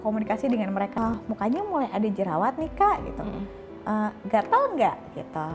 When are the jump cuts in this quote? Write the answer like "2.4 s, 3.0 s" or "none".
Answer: 0.9 s